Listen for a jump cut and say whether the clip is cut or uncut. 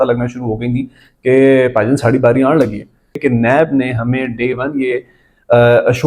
cut